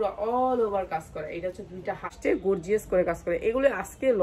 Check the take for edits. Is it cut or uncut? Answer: cut